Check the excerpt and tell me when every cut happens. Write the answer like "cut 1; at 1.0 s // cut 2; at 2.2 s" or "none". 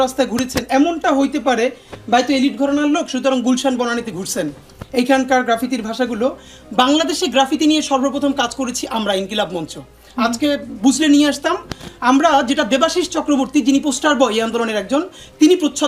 none